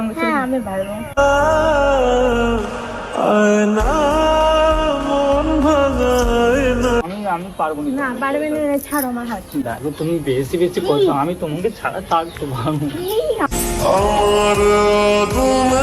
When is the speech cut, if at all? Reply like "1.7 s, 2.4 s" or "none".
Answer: 7.1 s